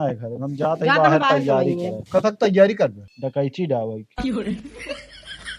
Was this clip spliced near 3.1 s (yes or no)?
yes